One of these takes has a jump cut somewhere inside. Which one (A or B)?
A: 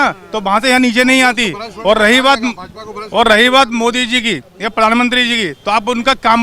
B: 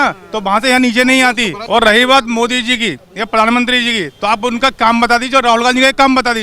B